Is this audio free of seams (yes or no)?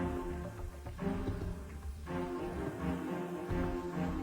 yes